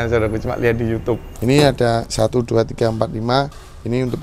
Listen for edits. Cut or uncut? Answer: cut